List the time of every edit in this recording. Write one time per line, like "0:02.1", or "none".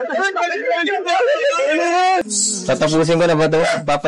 0:02.2